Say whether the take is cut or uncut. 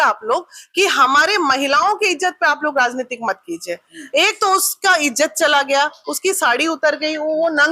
uncut